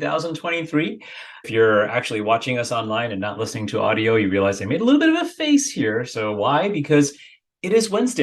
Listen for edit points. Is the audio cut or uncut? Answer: cut